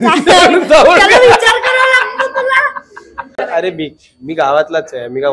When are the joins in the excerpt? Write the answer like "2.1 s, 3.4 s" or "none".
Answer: 3.3 s